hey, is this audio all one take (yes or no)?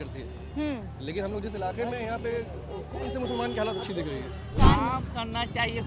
no